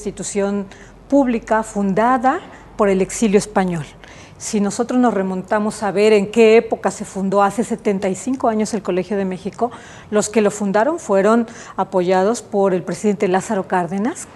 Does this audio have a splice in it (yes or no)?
no